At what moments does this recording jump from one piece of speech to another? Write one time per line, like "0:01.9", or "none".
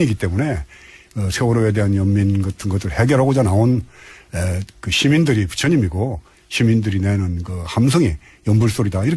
0:03.8